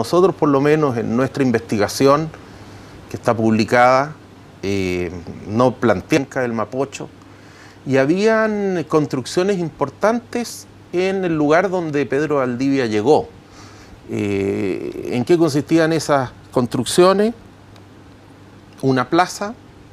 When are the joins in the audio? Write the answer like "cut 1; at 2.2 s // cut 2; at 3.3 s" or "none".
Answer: none